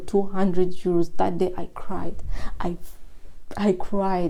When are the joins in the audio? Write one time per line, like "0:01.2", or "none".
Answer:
none

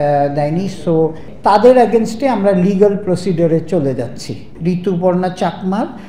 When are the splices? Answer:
0:01.3
0:04.5

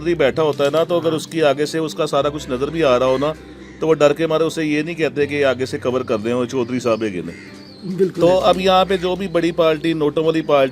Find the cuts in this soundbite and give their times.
none

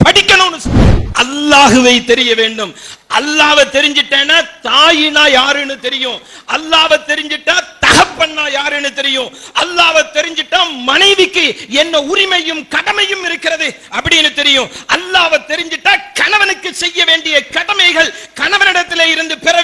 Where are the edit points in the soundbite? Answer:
0:01.0

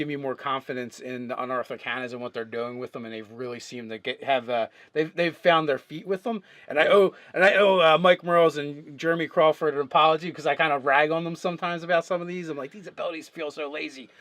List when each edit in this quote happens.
0:04.4

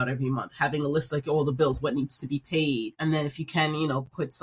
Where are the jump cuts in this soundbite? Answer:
0:02.9

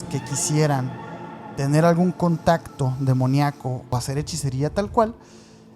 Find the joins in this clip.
0:03.9

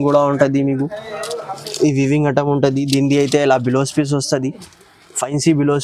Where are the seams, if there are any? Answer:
none

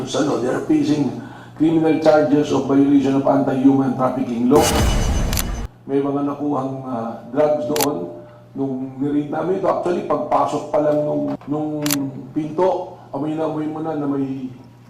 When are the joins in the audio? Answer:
0:05.2
0:11.4

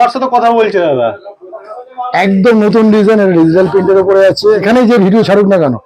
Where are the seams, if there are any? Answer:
0:04.6

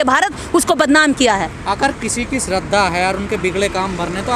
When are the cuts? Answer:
none

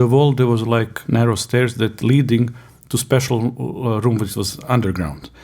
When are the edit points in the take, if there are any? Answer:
0:01.0

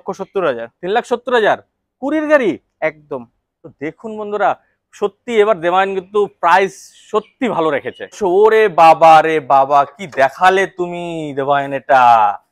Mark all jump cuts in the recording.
0:08.1

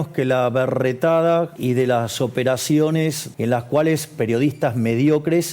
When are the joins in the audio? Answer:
0:01.5
0:03.2

